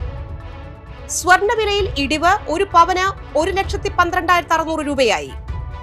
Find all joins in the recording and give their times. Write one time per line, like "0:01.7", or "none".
none